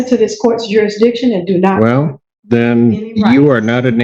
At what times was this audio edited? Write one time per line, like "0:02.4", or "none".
none